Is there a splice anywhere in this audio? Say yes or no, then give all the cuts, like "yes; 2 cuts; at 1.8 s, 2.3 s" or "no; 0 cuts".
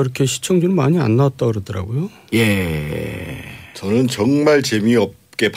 no; 0 cuts